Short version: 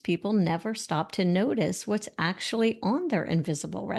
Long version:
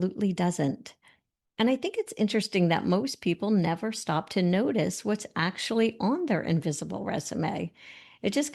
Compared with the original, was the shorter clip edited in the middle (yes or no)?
no